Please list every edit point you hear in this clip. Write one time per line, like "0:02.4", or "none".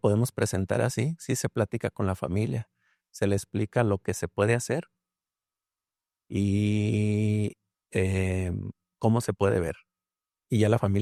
none